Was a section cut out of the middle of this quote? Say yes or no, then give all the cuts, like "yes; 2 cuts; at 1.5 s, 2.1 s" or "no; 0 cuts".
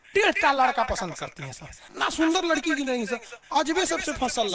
yes; 1 cut; at 1.9 s